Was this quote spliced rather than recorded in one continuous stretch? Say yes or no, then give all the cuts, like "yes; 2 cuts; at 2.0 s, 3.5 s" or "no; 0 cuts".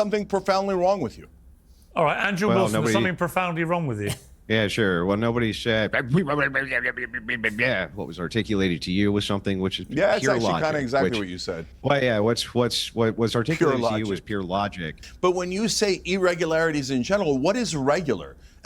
yes; 1 cut; at 15.0 s